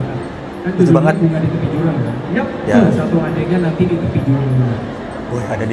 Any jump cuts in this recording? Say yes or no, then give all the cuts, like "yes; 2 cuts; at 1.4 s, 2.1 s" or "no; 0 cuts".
no; 0 cuts